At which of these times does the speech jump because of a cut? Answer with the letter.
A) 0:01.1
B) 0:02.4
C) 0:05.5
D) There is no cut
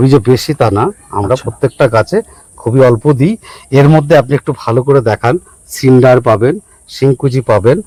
D